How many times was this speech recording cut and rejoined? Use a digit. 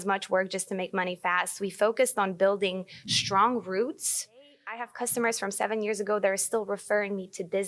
1